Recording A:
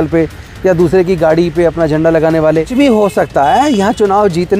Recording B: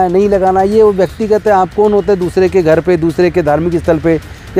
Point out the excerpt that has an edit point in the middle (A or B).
A